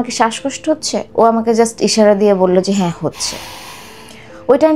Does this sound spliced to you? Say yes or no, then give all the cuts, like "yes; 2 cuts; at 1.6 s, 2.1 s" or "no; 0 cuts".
yes; 1 cut; at 1.1 s